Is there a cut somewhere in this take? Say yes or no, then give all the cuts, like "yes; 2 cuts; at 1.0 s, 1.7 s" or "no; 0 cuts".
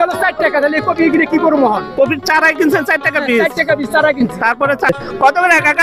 yes; 1 cut; at 4.9 s